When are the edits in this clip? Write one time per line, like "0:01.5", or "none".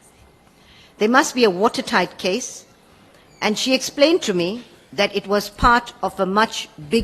none